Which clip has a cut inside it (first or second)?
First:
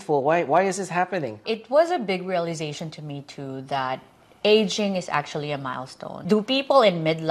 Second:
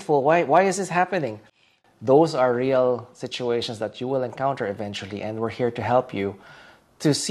first